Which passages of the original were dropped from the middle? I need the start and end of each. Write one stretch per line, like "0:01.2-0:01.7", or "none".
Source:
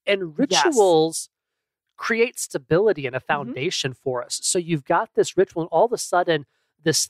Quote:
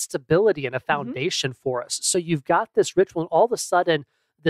none